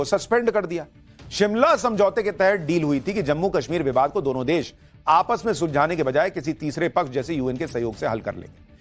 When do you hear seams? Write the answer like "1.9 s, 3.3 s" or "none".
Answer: none

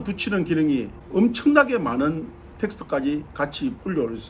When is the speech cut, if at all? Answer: 1.0 s

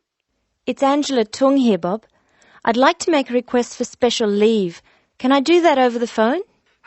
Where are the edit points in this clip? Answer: none

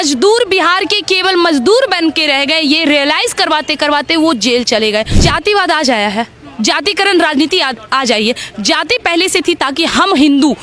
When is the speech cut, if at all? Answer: 5.1 s

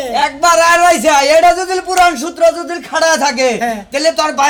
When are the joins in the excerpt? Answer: none

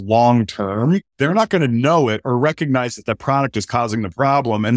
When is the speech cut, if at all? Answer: 1.1 s

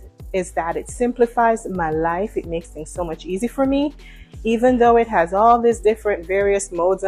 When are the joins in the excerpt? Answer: none

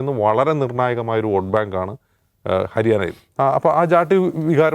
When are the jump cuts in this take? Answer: 3.2 s

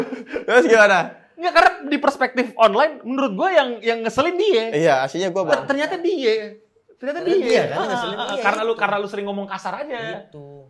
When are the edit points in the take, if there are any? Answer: none

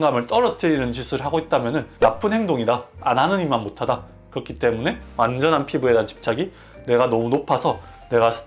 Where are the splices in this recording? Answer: 1.9 s, 5.0 s

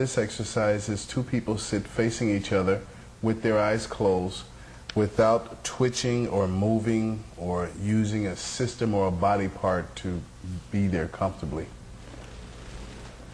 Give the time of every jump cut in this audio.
5.8 s

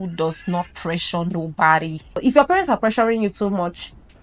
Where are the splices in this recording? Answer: 2.2 s

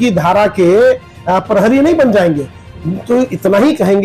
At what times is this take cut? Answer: none

